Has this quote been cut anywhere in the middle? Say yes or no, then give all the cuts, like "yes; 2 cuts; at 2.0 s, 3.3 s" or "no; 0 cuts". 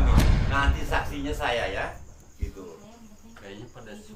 yes; 1 cut; at 2.8 s